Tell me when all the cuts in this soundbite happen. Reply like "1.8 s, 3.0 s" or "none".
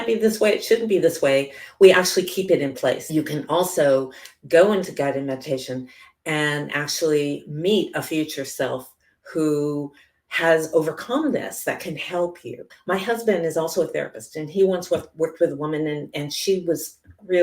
3.0 s, 12.7 s